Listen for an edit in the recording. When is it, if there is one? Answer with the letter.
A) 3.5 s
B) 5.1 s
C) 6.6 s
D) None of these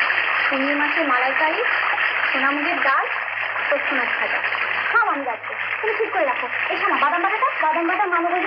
D